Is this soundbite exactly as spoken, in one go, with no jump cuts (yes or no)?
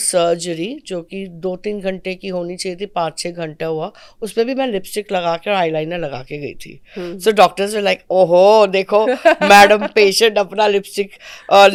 yes